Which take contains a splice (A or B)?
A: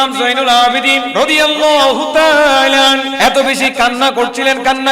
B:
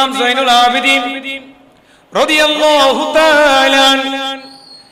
A